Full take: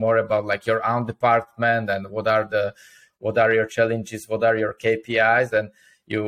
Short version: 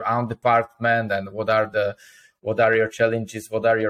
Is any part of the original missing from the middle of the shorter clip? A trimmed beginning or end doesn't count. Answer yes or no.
no